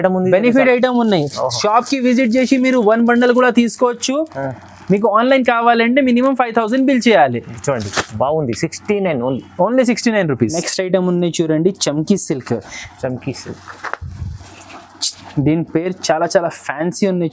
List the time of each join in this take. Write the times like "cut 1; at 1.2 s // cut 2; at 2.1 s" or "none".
none